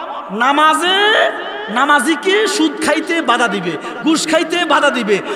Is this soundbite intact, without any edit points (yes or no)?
yes